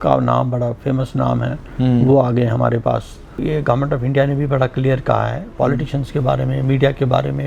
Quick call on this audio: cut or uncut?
cut